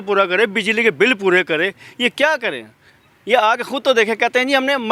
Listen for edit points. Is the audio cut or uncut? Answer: uncut